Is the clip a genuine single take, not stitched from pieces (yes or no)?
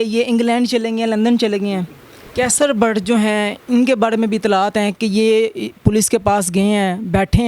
no